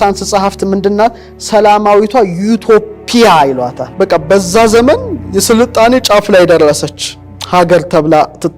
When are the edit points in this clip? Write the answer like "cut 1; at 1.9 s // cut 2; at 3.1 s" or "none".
cut 1; at 3.8 s